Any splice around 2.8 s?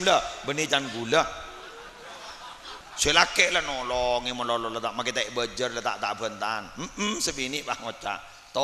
yes; 1 cut; at 2.8 s

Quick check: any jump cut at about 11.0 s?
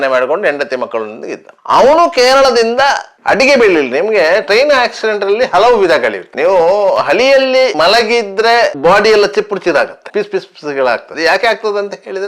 no; 1 cut; at 3.1 s

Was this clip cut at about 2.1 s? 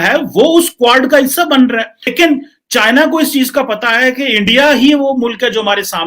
yes; 1 cut; at 2.1 s

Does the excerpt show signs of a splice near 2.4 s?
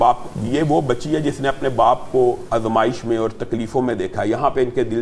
yes; 1 cut; at 2.4 s

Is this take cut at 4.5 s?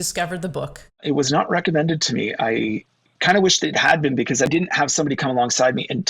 yes; 2 cuts; at 1.0 s, 4.5 s

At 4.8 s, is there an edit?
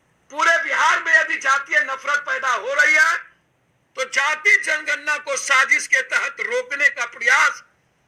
no; 1 cut; at 0.9 s

